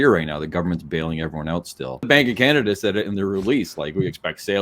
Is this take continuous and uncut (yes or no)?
no